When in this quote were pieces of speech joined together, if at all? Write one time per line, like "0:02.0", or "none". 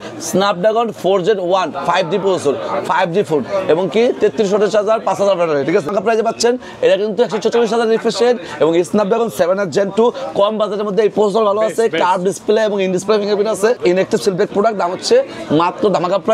0:05.9
0:13.8